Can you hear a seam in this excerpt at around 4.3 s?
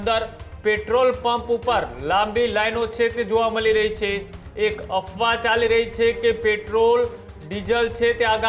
no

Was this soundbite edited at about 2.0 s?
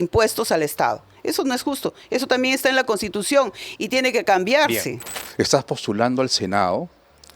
no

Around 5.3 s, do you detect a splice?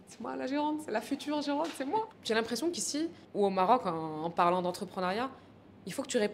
no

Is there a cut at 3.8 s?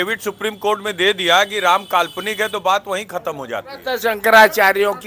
yes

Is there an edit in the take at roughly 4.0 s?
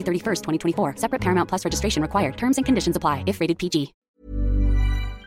yes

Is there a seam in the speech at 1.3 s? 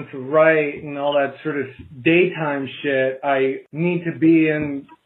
no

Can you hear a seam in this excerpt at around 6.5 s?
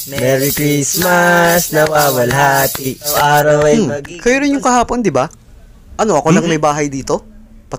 no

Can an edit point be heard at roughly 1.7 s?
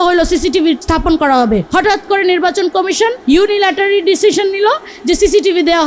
yes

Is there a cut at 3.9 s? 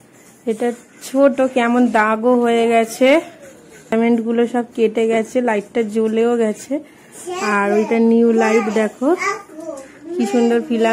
yes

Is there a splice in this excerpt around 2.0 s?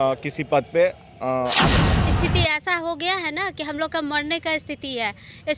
yes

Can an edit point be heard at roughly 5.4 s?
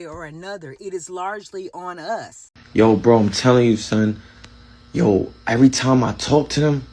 no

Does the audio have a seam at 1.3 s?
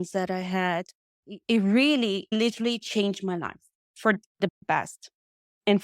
yes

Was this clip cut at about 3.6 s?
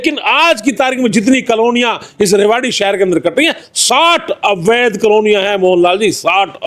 no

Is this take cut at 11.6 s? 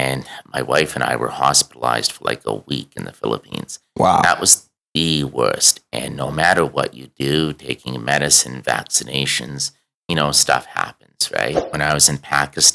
yes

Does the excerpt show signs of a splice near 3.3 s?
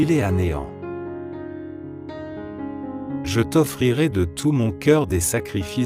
yes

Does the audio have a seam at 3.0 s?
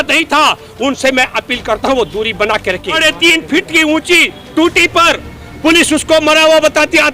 yes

